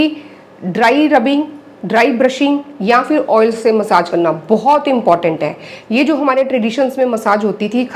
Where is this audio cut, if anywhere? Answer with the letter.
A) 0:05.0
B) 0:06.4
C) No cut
C